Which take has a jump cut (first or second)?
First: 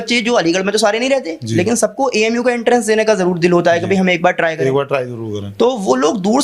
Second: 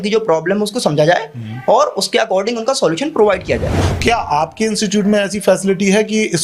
second